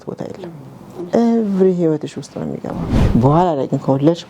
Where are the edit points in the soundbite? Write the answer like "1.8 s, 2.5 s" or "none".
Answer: 2.9 s